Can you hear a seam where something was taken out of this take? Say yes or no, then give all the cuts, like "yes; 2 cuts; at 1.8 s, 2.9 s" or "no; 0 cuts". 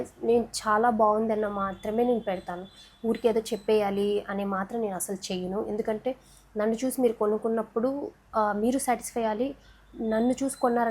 no; 0 cuts